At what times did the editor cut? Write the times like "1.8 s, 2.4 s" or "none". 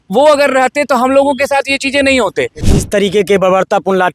2.6 s